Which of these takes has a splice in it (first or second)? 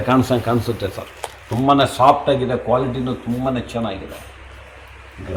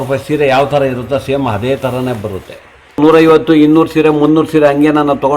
second